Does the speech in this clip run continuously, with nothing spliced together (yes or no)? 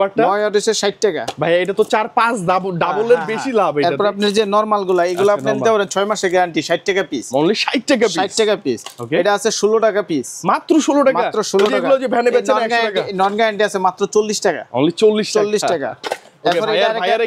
yes